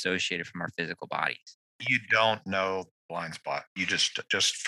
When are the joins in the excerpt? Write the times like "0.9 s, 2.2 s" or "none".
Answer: 1.9 s